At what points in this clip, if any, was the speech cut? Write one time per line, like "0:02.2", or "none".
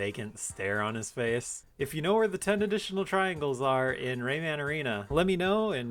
0:01.6
0:05.0